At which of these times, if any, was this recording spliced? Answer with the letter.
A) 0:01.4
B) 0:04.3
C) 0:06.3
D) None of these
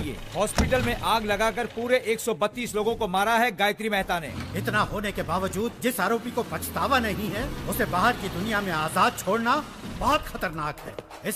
B